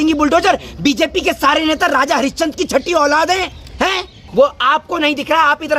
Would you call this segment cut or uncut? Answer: cut